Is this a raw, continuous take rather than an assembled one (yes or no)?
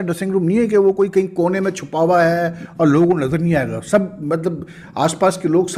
yes